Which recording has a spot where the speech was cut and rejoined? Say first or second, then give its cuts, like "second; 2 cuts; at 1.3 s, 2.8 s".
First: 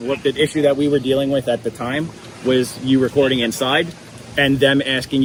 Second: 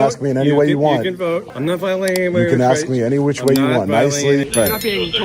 second; 2 cuts; at 1.5 s, 4.5 s